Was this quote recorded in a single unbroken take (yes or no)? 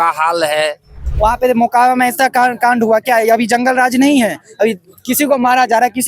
no